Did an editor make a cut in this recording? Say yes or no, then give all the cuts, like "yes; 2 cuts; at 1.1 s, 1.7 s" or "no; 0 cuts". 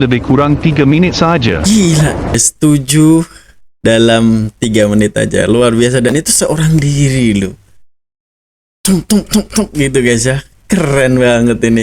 yes; 1 cut; at 2.3 s